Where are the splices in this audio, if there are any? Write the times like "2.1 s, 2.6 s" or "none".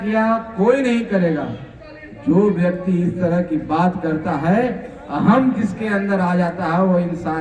none